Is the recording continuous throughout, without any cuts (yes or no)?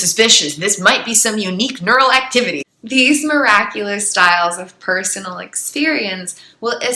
no